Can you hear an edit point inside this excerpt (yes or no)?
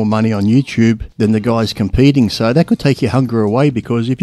yes